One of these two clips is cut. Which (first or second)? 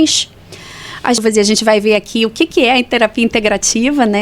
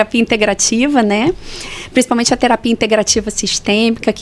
first